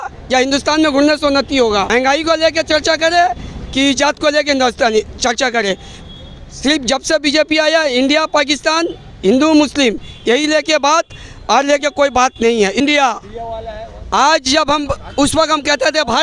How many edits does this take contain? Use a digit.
2